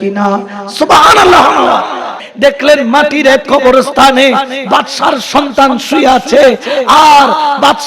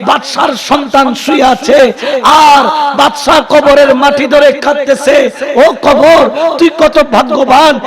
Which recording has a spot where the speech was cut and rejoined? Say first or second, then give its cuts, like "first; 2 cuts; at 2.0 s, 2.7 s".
first; 1 cut; at 2.2 s